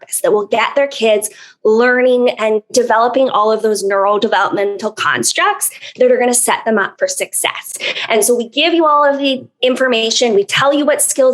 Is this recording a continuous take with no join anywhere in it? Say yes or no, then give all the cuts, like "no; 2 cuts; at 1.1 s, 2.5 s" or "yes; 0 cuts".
yes; 0 cuts